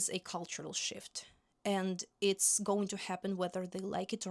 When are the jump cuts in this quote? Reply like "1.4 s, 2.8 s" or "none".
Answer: none